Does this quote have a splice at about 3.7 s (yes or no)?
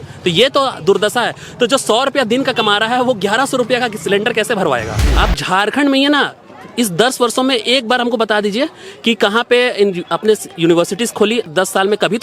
no